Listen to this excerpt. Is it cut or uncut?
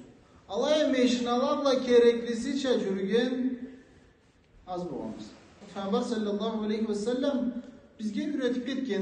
cut